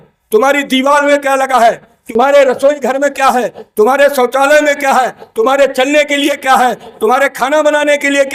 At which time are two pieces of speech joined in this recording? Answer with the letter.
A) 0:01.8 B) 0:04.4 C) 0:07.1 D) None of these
D